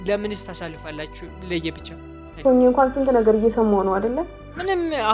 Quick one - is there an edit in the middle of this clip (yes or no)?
yes